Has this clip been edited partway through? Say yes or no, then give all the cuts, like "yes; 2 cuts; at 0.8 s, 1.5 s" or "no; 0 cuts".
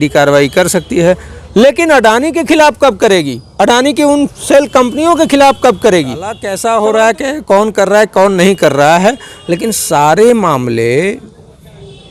yes; 1 cut; at 6.5 s